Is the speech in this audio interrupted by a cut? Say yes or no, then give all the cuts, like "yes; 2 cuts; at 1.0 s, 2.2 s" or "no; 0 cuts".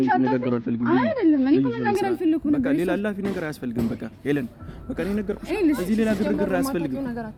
no; 0 cuts